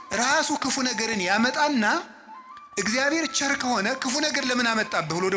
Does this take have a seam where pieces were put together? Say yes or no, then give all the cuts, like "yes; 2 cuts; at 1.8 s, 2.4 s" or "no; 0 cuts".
no; 0 cuts